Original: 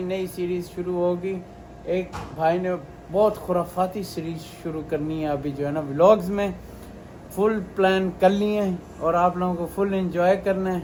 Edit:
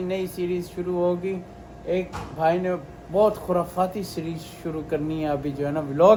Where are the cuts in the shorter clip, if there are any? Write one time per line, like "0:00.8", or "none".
none